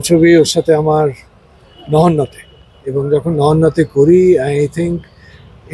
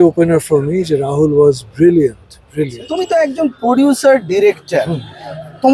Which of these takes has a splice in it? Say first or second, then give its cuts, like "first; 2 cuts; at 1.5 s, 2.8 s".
second; 1 cut; at 3.1 s